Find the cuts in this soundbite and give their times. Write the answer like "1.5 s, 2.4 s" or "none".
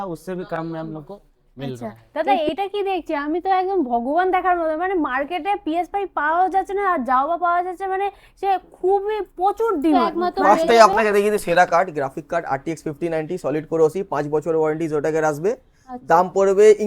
2.0 s, 10.1 s